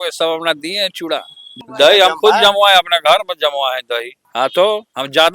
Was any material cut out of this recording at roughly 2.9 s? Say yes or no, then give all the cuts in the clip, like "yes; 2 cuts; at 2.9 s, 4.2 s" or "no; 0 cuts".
no; 2 cuts; at 1.5 s, 4.2 s